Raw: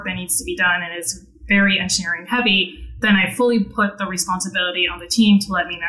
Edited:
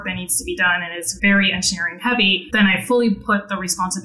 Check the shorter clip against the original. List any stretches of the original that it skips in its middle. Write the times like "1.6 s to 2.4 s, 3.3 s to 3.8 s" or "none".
1.0 s to 1.3 s, 2.7 s to 2.9 s